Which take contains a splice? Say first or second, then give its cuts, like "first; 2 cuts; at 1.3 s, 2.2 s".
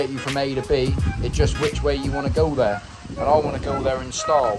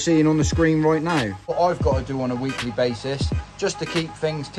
second; 1 cut; at 1.5 s